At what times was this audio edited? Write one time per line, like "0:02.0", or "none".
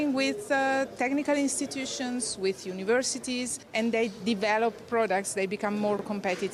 none